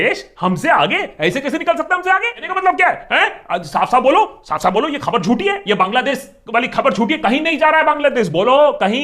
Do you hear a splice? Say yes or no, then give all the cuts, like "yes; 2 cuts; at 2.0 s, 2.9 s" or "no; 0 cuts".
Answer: yes; 1 cut; at 2.4 s